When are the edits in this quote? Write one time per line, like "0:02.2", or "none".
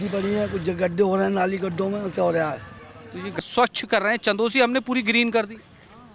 0:03.4